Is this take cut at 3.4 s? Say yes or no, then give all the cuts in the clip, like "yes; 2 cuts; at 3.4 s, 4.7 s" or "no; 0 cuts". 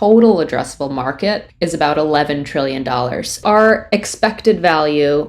yes; 2 cuts; at 1.5 s, 3.4 s